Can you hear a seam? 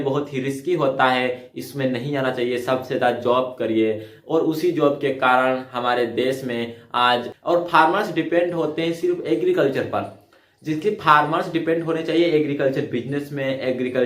yes; 1 cut; at 7.3 s

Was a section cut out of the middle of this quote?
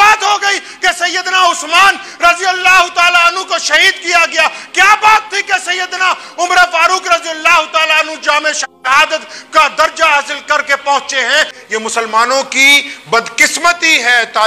yes; 1 cut; at 11.6 s

